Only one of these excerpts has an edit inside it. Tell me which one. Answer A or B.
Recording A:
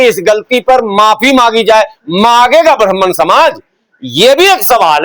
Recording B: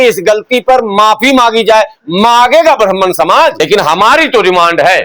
B